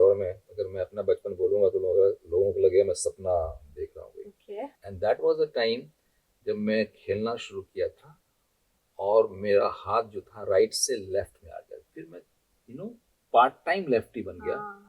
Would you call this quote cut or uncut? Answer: cut